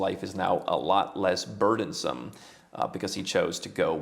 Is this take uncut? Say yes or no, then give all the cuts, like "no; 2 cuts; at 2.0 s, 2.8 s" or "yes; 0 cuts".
yes; 0 cuts